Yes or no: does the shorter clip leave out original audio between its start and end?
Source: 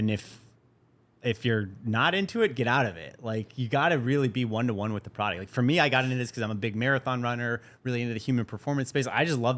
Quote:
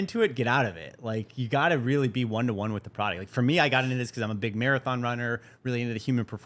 no